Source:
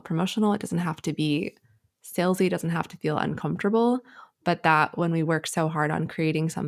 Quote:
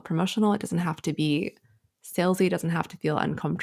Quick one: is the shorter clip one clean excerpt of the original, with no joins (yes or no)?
yes